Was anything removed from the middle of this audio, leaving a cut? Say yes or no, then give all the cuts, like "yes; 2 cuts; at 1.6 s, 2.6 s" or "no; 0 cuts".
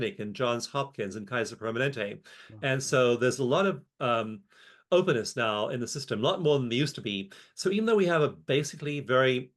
no; 0 cuts